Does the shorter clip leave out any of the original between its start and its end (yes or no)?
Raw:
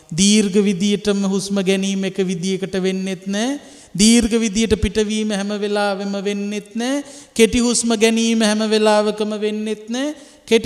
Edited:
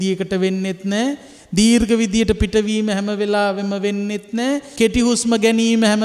yes